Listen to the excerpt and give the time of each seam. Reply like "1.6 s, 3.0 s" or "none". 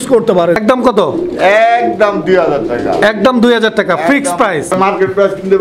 0.9 s, 4.7 s